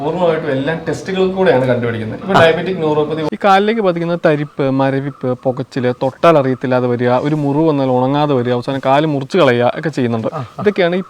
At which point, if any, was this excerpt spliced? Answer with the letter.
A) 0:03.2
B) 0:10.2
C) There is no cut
A